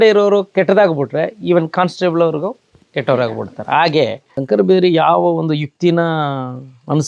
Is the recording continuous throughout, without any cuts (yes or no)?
no